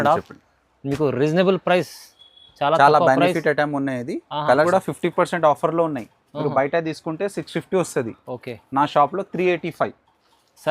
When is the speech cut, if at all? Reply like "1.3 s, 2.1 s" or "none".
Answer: 4.7 s